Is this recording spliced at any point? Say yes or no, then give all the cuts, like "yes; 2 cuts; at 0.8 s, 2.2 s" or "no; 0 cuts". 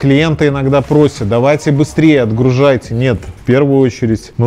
no; 0 cuts